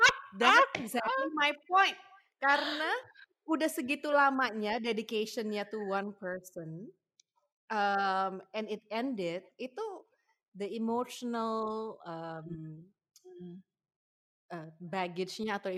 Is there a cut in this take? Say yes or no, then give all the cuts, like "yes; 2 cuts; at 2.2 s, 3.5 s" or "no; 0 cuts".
no; 0 cuts